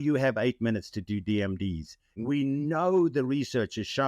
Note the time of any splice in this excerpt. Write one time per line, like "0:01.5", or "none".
0:02.1